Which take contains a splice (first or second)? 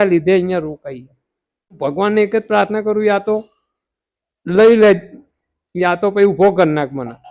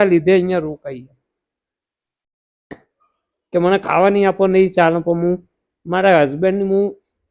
first